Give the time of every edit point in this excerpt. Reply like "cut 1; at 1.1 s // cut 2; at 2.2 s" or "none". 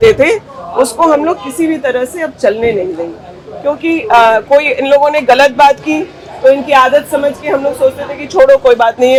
none